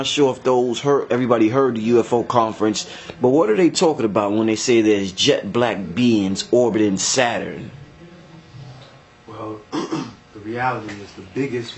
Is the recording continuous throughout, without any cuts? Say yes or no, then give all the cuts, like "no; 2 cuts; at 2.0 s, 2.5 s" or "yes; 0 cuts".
yes; 0 cuts